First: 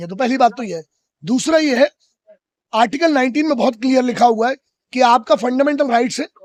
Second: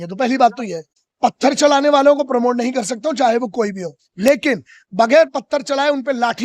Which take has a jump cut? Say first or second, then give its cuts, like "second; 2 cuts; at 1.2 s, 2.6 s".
second; 1 cut; at 1.0 s